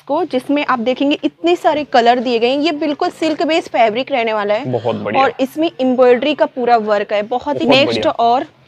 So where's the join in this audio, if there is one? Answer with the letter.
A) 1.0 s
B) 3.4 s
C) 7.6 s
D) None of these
C